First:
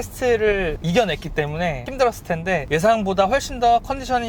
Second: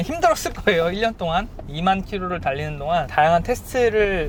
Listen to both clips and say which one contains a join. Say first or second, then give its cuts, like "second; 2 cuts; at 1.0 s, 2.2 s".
first; 2 cuts; at 1.8 s, 2.6 s